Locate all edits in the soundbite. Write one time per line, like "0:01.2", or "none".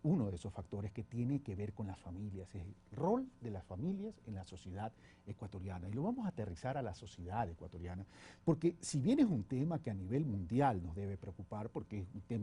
0:07.1